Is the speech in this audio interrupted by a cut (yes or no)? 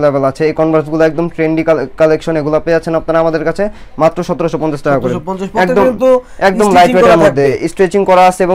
no